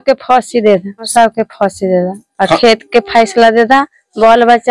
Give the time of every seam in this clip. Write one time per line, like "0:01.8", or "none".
0:01.1